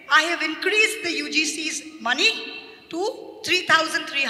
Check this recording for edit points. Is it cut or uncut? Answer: uncut